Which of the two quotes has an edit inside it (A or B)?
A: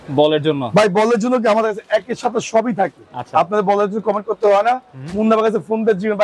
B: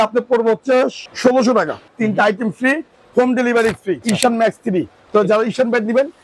B